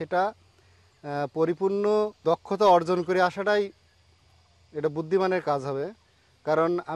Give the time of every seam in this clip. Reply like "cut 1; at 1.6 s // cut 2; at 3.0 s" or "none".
cut 1; at 2.2 s